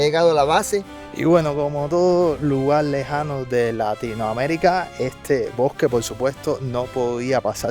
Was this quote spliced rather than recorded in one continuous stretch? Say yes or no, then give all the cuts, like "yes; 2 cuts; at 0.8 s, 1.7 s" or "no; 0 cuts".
yes; 1 cut; at 1.0 s